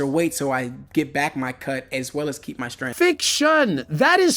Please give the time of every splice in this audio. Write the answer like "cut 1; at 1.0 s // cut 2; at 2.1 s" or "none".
cut 1; at 2.8 s